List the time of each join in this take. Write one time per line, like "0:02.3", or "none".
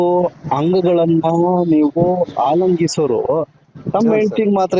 none